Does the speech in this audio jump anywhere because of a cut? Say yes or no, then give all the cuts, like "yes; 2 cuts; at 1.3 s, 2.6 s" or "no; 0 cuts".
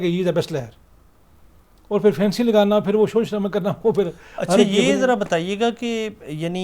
no; 0 cuts